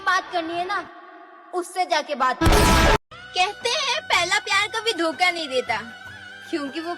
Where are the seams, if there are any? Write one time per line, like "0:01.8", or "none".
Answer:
0:03.2